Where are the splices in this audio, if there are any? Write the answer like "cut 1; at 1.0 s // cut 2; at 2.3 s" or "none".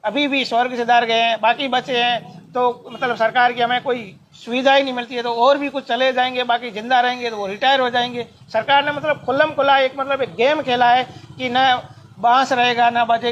none